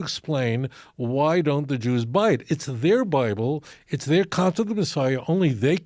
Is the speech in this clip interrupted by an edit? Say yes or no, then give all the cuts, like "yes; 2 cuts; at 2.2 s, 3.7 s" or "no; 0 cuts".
no; 0 cuts